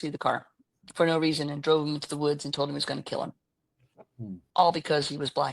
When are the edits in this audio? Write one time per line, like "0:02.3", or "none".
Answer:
0:04.4